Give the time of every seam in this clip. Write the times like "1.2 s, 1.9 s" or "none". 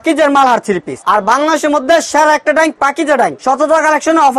0.9 s, 3.4 s